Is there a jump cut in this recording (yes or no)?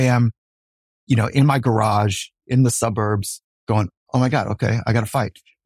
no